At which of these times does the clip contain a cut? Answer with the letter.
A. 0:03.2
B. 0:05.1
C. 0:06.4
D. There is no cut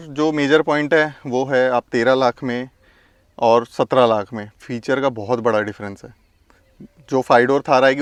D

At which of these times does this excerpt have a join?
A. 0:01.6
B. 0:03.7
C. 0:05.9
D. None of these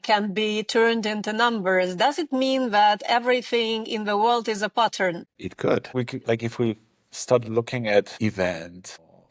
C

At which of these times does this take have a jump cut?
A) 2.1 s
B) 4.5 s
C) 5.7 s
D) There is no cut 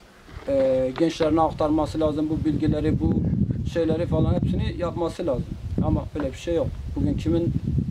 D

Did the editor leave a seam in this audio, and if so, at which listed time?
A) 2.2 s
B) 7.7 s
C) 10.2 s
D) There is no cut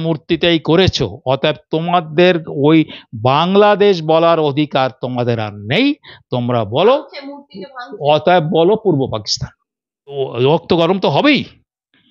C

